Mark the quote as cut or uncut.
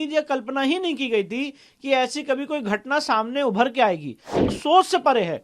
cut